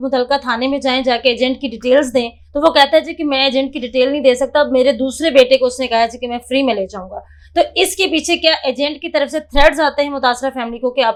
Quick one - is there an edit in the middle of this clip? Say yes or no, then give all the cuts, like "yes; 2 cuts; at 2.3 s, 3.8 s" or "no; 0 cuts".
no; 0 cuts